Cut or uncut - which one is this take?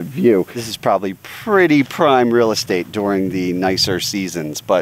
uncut